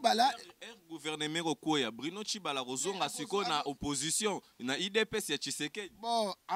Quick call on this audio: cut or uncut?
uncut